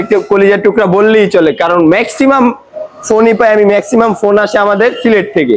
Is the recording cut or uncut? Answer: uncut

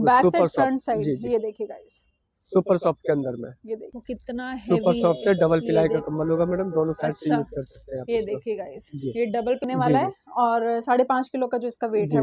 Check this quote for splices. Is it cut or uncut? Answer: cut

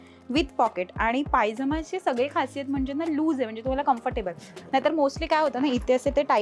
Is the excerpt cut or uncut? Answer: uncut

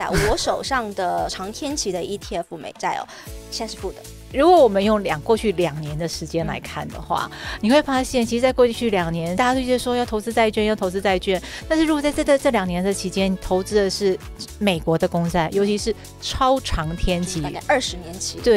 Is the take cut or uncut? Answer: uncut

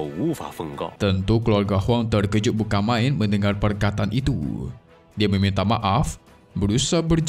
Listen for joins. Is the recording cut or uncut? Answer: uncut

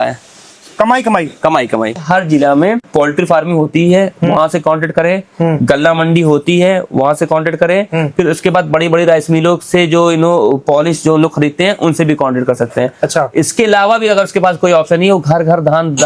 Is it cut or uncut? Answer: cut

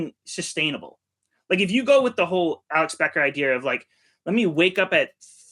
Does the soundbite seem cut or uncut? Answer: cut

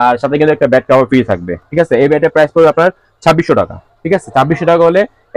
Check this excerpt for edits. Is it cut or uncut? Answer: uncut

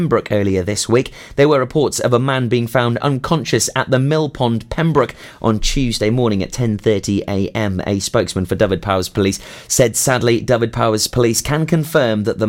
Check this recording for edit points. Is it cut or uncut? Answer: uncut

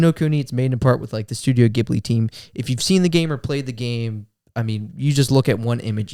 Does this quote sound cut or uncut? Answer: uncut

